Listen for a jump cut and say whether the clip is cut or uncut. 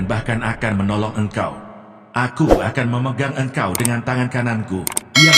uncut